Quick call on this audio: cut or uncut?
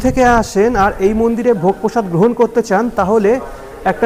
uncut